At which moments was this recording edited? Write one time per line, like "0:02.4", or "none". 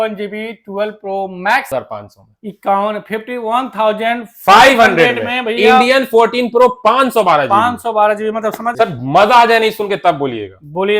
0:01.7
0:08.6